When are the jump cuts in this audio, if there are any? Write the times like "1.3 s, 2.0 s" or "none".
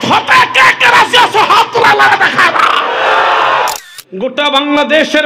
3.7 s